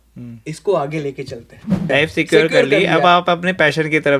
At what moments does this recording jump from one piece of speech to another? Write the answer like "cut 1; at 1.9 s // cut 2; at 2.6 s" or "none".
cut 1; at 1.9 s